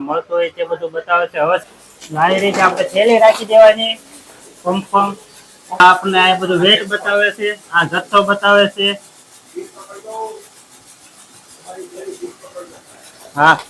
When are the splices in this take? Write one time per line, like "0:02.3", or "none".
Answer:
0:01.6
0:05.8

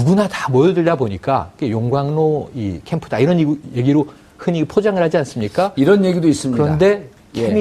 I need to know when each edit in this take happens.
0:06.4

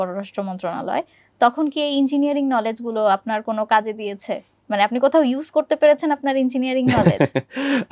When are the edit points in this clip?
none

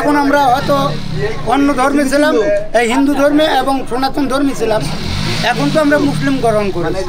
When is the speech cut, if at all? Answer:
none

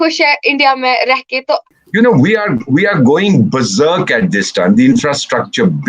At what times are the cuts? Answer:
0:01.7

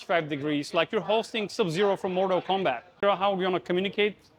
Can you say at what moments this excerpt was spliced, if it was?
0:03.0

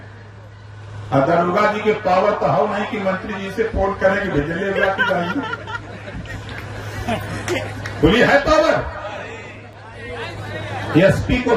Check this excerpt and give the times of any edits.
none

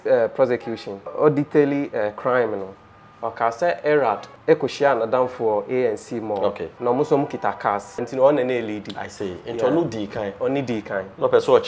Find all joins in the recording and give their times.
0:01.1
0:06.7
0:08.1

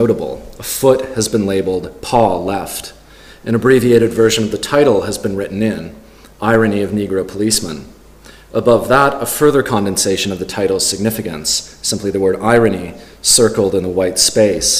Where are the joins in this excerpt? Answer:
none

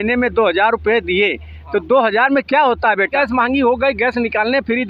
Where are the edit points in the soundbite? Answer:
0:03.1

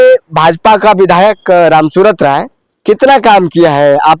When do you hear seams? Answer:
none

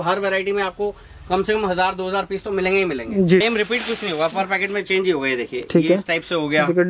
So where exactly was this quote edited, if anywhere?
0:03.4

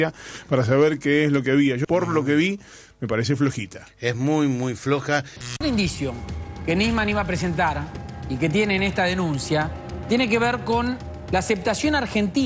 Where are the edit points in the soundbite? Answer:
0:05.4

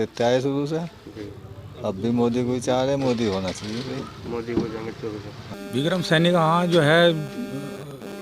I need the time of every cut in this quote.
0:05.5

